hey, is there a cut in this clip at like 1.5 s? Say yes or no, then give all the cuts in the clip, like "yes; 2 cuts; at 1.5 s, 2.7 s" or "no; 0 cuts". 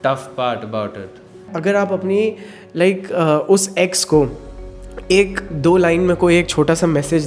yes; 1 cut; at 1.5 s